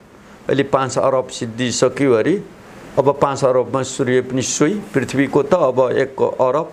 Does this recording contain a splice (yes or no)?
no